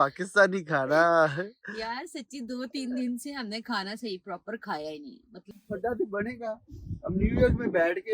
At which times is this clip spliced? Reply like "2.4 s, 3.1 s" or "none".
5.5 s